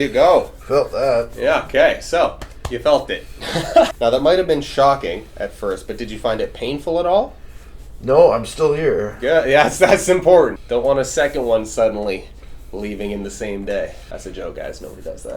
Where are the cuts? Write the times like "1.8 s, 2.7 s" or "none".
3.9 s, 10.6 s, 14.0 s